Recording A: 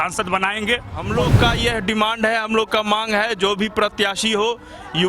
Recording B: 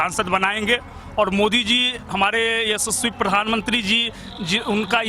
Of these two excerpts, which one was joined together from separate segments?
A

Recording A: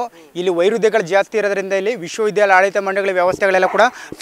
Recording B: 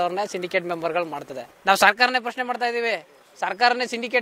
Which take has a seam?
B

